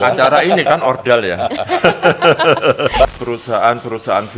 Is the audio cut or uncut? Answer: cut